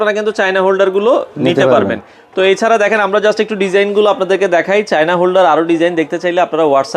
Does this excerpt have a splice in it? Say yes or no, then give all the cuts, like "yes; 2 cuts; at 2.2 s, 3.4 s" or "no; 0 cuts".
no; 0 cuts